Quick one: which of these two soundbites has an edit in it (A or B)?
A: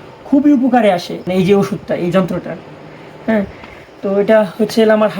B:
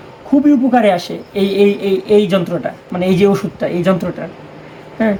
A